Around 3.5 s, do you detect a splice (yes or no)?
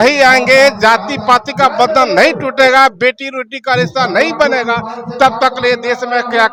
no